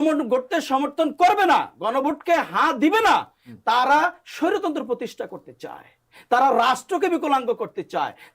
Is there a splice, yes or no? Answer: no